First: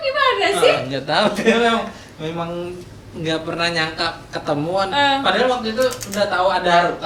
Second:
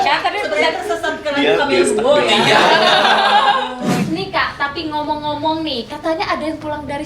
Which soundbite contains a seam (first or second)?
second